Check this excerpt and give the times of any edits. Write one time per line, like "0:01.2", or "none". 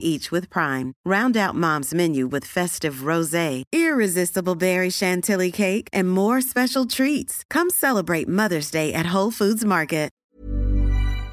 0:10.3